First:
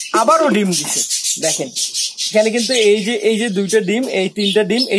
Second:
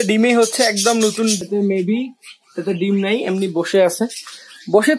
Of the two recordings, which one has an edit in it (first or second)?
second